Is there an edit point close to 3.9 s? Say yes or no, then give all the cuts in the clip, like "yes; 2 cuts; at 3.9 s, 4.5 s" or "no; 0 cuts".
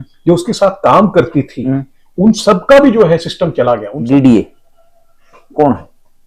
yes; 1 cut; at 3.9 s